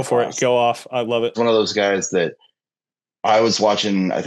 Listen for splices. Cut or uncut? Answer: uncut